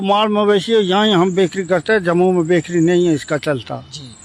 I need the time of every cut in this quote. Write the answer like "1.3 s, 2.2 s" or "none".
none